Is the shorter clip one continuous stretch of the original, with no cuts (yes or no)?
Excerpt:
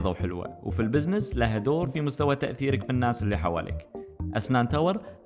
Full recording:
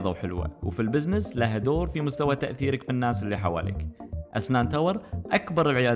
yes